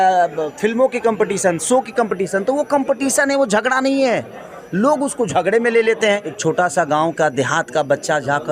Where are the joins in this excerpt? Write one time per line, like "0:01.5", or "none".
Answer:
0:06.3